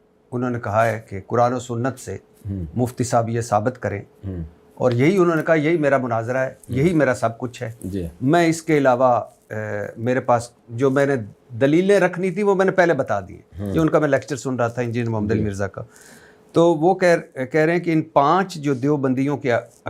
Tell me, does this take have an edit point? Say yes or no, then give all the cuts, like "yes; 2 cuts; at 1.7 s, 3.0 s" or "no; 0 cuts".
no; 0 cuts